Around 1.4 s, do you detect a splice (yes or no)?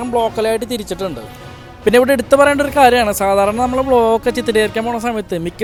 no